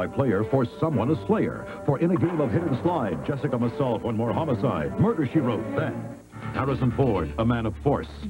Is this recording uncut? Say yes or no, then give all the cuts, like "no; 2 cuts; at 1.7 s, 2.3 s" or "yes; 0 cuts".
yes; 0 cuts